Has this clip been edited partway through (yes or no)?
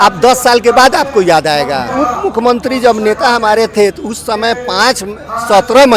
yes